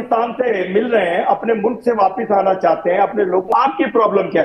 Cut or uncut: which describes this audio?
cut